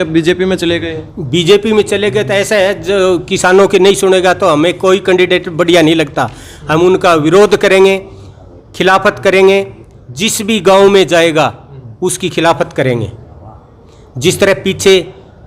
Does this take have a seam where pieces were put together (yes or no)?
no